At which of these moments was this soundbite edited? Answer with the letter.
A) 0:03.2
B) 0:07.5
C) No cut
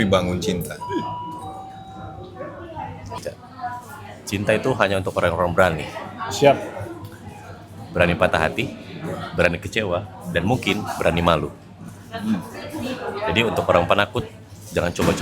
A